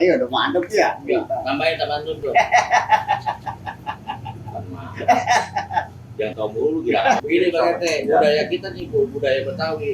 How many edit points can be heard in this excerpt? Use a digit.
1